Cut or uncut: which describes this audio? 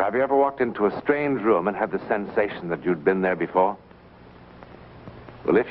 uncut